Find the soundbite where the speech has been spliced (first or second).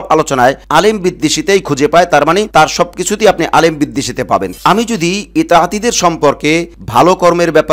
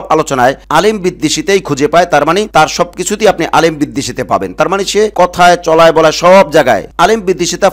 first